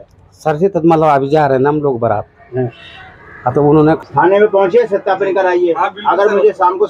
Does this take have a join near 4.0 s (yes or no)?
yes